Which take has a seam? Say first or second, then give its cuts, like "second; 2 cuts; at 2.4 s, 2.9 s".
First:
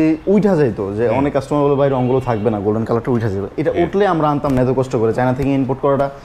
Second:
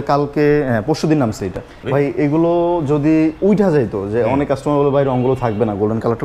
second; 1 cut; at 1.7 s